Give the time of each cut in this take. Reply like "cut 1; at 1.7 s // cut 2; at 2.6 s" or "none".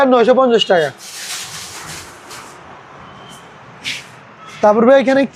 none